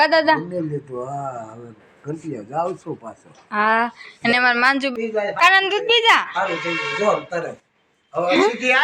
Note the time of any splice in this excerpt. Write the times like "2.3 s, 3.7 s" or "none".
4.9 s